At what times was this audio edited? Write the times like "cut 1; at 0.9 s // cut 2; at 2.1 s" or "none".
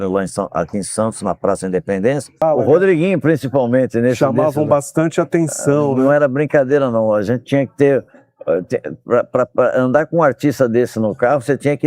cut 1; at 2.4 s